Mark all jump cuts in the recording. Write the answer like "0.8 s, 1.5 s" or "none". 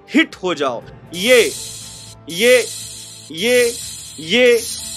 0.9 s

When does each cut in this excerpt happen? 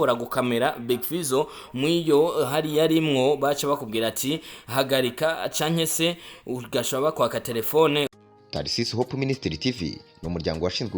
8.1 s

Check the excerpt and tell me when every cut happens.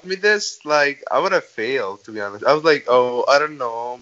none

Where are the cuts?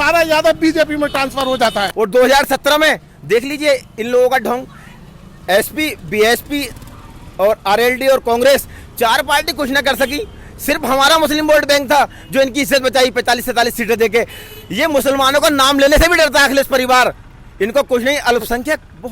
1.9 s

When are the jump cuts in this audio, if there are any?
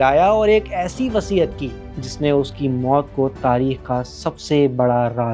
none

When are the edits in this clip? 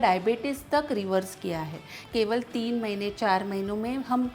2.0 s

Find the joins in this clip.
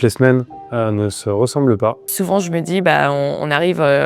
2.0 s

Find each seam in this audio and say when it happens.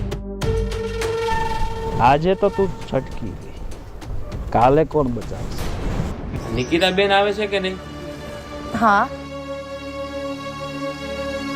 6.3 s

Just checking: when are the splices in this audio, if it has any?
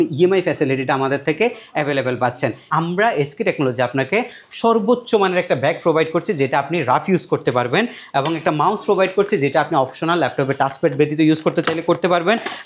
2.6 s

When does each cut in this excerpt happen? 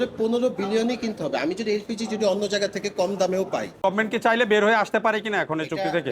3.7 s

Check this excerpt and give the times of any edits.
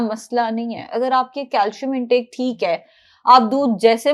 none

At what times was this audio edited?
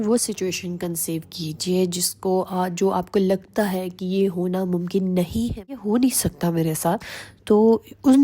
5.8 s

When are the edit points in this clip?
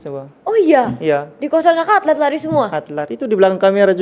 none

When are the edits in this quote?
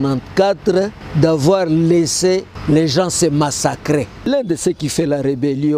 1.0 s, 2.5 s, 4.3 s

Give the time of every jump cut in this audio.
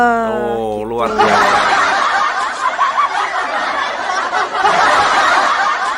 4.6 s

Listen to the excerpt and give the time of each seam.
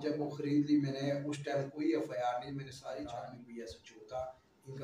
3.4 s

